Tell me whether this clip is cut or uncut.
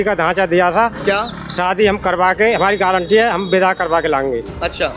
uncut